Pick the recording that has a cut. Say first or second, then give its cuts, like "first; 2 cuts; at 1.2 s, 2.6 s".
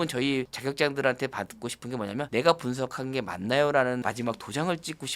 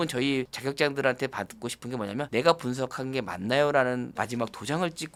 first; 1 cut; at 4.0 s